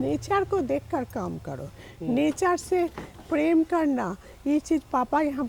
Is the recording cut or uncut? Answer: uncut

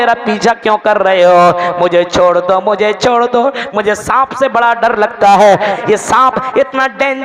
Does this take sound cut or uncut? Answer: cut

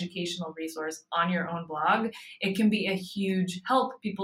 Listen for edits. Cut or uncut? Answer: uncut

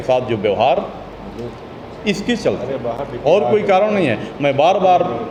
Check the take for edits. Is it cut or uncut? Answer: uncut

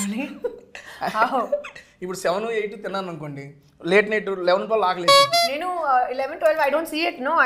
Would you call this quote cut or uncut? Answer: uncut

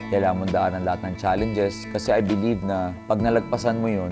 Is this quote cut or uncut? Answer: uncut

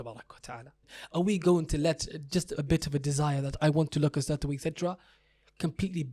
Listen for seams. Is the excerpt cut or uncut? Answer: cut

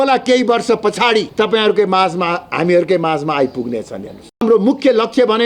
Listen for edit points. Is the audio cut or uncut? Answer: cut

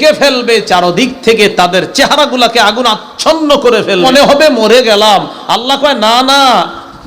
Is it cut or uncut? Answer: cut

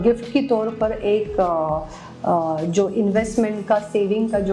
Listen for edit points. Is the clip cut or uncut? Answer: uncut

